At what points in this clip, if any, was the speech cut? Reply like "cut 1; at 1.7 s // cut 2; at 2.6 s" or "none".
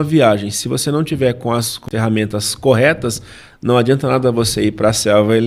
cut 1; at 1.8 s